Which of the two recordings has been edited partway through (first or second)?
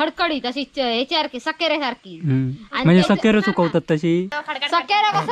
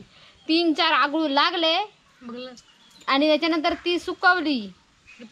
first